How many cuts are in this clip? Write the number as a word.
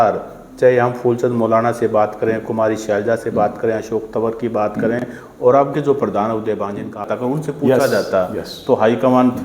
one